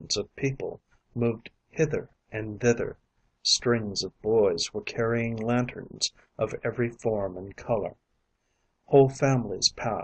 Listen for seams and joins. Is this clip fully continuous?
no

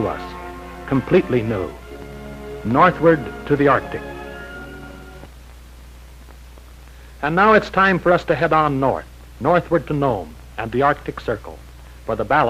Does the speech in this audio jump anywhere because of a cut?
no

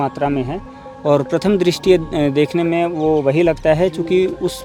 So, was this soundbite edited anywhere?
no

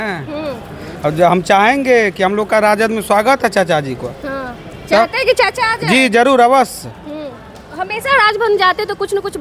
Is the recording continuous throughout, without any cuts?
yes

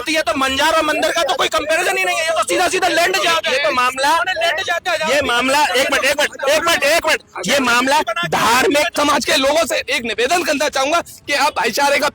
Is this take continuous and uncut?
no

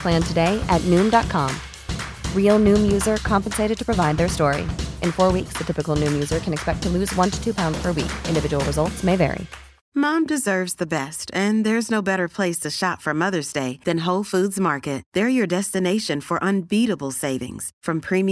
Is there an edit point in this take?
yes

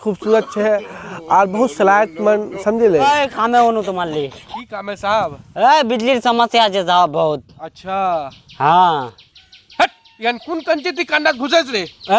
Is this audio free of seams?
no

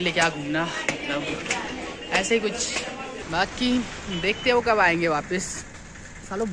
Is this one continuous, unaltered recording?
no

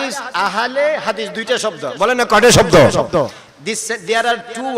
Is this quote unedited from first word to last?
yes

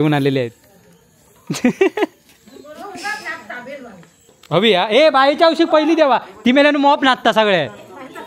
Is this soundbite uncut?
no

